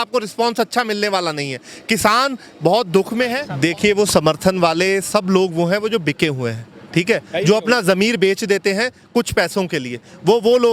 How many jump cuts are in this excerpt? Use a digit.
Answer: 1